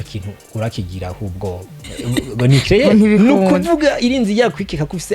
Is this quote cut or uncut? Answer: cut